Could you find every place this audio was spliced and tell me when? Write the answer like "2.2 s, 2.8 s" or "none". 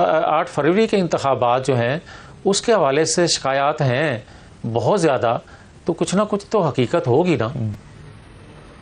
none